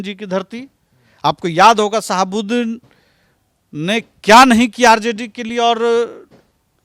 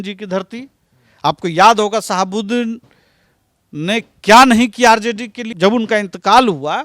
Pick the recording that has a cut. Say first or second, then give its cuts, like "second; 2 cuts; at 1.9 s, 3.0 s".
second; 1 cut; at 5.4 s